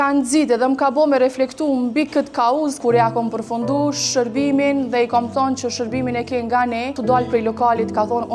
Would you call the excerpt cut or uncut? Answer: cut